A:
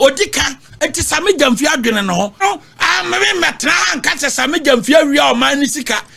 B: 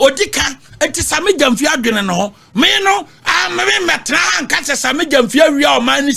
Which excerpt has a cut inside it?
A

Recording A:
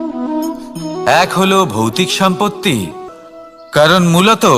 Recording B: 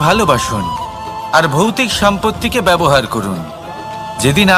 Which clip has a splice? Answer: A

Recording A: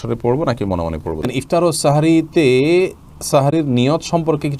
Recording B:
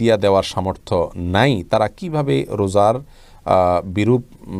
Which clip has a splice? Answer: A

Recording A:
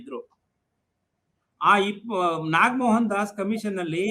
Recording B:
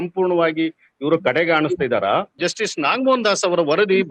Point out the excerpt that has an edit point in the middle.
B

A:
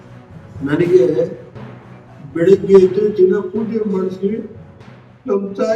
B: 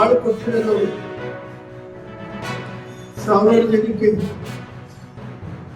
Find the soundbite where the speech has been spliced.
B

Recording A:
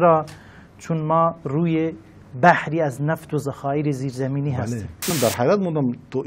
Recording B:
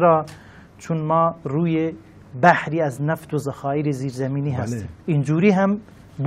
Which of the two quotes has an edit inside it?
A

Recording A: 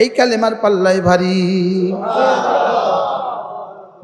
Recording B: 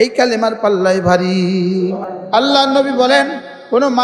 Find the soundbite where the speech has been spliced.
B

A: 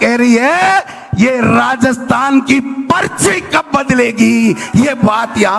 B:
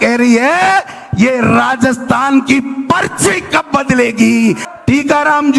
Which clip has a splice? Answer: B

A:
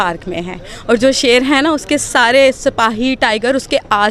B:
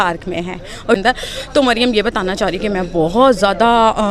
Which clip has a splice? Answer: B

